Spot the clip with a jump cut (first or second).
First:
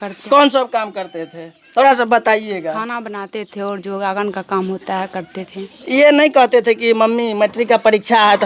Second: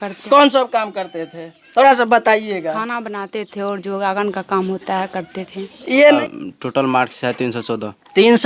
second